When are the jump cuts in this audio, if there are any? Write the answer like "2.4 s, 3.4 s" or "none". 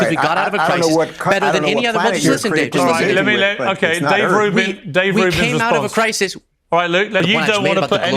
7.2 s

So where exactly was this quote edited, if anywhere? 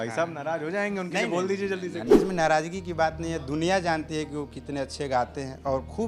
2.1 s

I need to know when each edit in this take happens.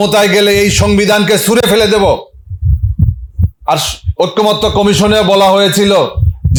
none

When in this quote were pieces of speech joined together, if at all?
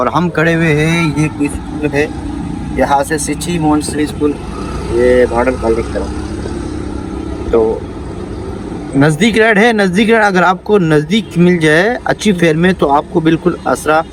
none

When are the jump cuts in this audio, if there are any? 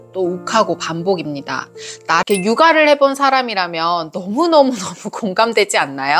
2.1 s

